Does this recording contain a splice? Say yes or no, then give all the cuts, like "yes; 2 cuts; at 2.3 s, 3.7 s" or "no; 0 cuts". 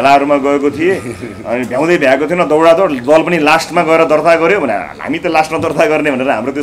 no; 0 cuts